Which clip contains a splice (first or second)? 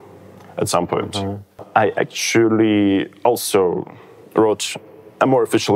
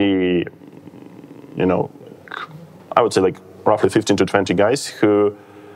first